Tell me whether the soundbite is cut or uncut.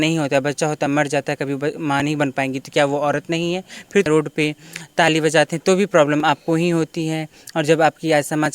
cut